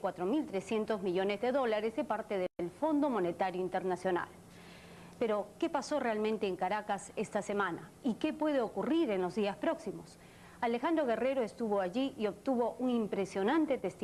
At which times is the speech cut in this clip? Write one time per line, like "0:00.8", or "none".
0:09.3